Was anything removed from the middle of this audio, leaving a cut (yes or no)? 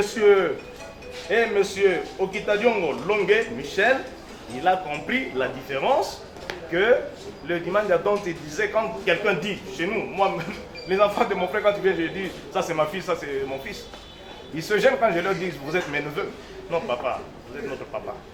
no